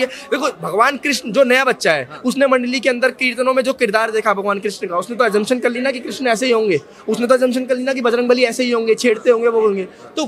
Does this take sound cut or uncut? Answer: uncut